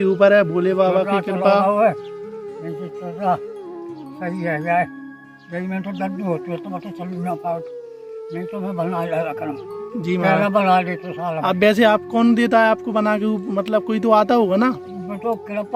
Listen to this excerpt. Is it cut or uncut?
uncut